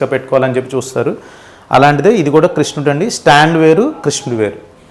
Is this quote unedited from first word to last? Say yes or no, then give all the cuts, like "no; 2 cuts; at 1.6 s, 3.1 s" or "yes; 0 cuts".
yes; 0 cuts